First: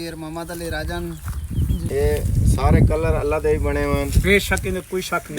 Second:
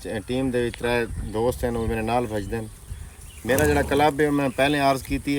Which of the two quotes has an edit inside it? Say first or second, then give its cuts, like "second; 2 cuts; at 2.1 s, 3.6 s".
first; 1 cut; at 1.8 s